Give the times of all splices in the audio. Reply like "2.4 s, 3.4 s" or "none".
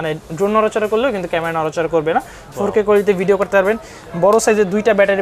none